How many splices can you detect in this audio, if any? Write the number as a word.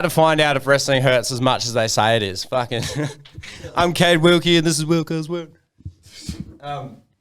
zero